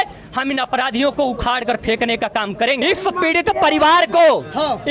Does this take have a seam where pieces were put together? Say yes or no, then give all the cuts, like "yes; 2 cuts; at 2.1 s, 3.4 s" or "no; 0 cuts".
yes; 1 cut; at 2.8 s